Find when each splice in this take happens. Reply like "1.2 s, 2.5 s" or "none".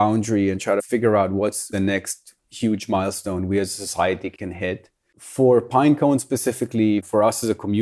1.7 s, 7.1 s